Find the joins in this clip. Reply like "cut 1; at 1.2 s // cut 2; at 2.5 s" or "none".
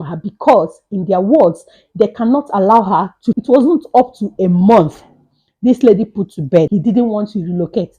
cut 1; at 3.4 s // cut 2; at 6.7 s